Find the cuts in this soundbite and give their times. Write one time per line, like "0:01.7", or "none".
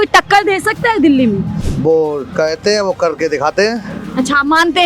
0:01.6